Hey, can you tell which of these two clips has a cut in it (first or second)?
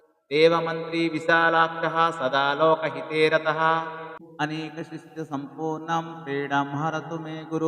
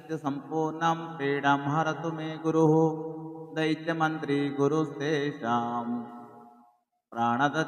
first